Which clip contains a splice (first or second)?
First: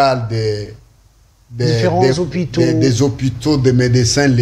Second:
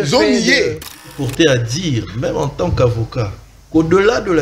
second